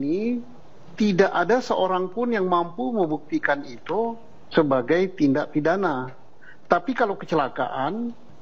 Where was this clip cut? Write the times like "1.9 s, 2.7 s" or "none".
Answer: none